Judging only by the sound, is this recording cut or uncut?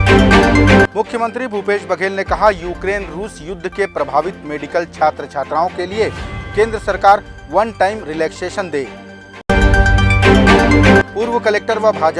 cut